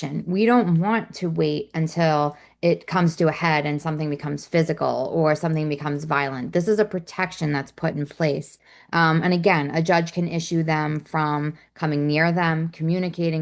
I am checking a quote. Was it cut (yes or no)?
no